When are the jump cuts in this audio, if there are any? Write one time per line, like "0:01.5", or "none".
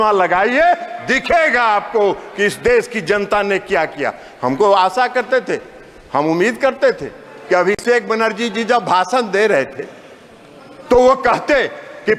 none

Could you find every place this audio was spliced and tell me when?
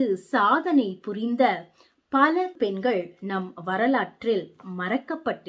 0:02.5

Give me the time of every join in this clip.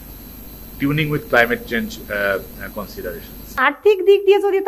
0:03.5

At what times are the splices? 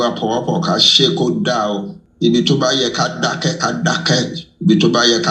0:02.0

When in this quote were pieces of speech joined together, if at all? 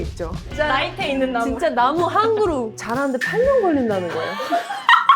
0:02.8

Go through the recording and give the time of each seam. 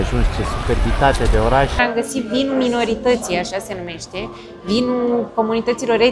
0:01.8

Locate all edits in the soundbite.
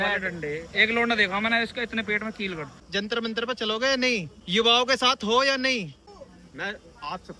0:02.7
0:06.1

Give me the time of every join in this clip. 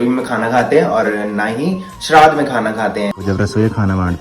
0:03.2

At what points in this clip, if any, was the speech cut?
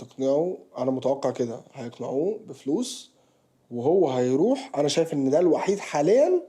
none

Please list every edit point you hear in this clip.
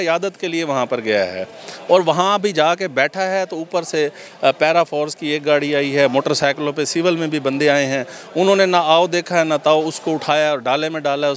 none

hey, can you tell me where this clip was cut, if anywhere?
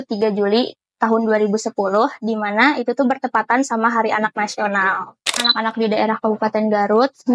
0:05.5

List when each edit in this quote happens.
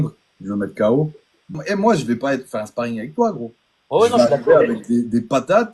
0:01.5

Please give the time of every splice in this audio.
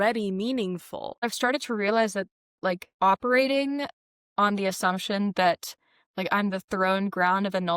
0:01.2
0:02.9

